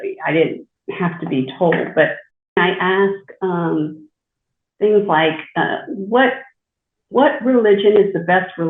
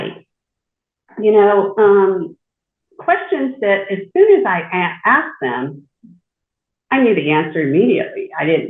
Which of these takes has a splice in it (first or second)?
first